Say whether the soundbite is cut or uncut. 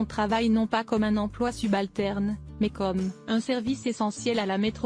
uncut